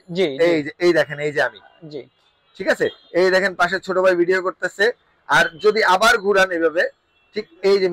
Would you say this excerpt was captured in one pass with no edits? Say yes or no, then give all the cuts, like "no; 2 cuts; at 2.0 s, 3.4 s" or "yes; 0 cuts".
yes; 0 cuts